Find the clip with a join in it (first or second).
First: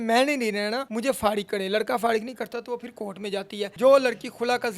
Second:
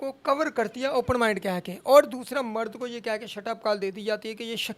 first